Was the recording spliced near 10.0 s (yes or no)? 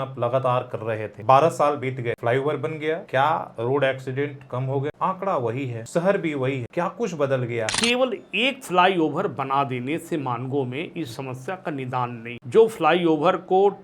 no